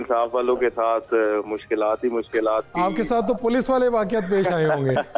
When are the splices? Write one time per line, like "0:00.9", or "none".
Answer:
none